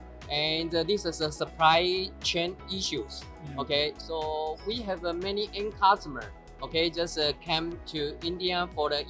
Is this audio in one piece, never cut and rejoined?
yes; 0 cuts

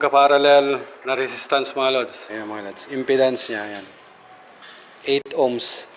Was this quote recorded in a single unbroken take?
no; 2 cuts; at 0.9 s, 2.2 s

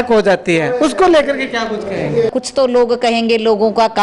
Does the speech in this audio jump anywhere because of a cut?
yes; 1 cut; at 2.3 s

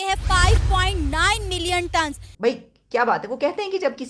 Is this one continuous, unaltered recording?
no; 1 cut; at 2.3 s

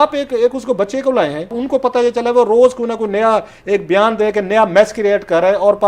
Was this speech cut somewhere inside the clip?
yes; 1 cut; at 1.6 s

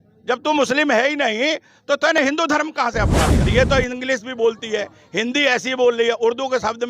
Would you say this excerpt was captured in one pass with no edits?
no; 1 cut; at 3.5 s

